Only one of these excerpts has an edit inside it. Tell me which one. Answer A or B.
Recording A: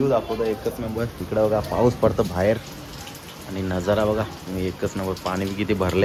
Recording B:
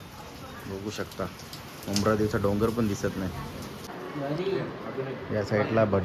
B